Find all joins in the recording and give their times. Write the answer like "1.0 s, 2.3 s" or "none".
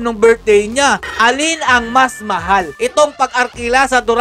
1.0 s, 2.7 s